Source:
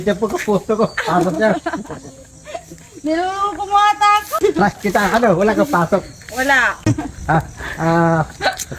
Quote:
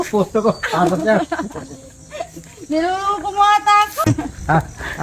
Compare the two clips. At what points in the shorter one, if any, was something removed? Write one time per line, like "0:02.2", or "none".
0:04.0